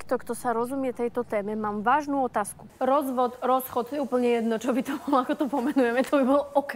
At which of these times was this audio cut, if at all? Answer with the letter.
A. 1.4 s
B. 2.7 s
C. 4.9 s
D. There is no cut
B